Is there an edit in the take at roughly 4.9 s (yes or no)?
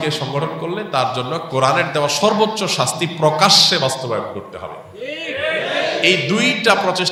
no